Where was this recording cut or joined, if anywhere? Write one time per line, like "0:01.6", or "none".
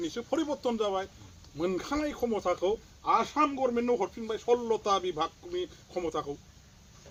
none